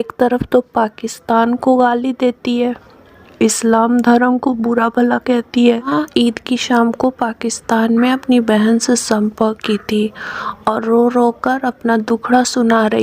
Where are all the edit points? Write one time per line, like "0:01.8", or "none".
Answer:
0:05.9